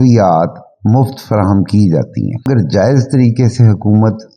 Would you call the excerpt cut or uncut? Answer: cut